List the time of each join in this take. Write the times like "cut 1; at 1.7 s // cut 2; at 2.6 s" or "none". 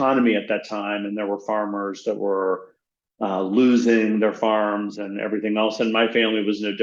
none

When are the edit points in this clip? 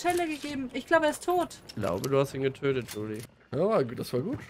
cut 1; at 3.1 s

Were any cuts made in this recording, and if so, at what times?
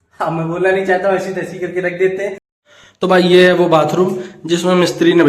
cut 1; at 2.5 s

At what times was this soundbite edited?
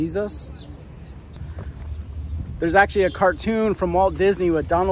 cut 1; at 1.3 s

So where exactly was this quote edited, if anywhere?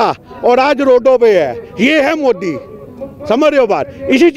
none

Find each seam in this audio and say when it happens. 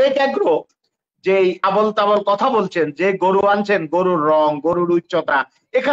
cut 1; at 1.6 s

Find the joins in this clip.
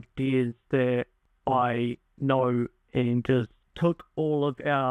cut 1; at 1.2 s // cut 2; at 3.6 s

